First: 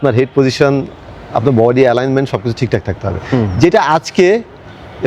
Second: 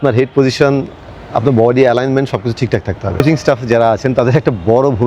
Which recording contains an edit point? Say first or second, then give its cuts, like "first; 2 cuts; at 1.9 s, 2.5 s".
second; 1 cut; at 3.2 s